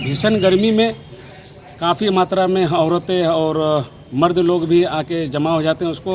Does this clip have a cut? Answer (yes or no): no